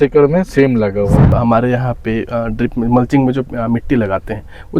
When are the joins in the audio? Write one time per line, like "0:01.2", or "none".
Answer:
0:01.4